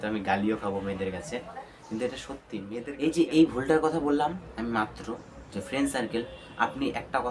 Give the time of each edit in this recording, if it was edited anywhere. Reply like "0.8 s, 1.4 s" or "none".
2.8 s